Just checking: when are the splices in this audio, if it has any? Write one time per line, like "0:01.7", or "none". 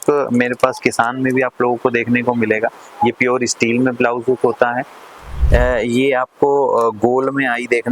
0:05.3